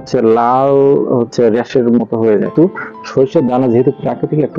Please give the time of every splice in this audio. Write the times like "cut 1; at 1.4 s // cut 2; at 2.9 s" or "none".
cut 1; at 2.5 s